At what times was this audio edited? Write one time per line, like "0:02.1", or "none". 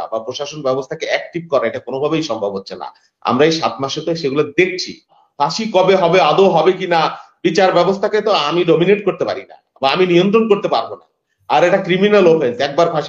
0:05.1

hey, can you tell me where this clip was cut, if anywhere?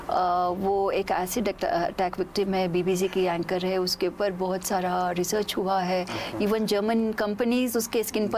none

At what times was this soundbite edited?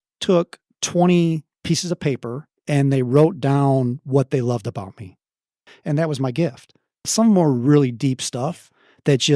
0:05.7
0:07.1

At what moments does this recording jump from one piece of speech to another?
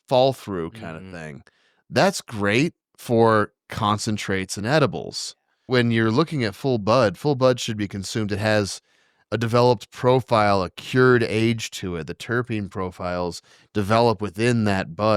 0:02.9
0:05.6

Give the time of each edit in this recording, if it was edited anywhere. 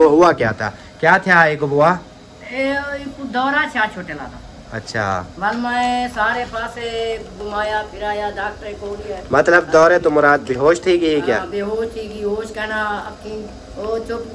none

